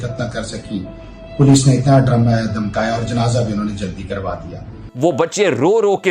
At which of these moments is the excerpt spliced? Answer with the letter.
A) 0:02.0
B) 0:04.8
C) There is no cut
B